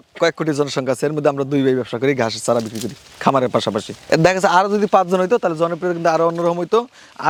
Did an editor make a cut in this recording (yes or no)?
no